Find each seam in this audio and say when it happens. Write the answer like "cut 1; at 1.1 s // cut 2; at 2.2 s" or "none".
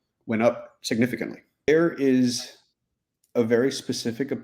cut 1; at 1.7 s